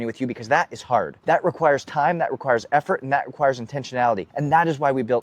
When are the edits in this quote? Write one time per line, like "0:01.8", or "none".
0:01.1
0:04.3